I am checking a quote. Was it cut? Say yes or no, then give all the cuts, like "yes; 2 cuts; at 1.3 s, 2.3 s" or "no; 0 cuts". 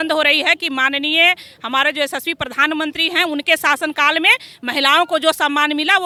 no; 0 cuts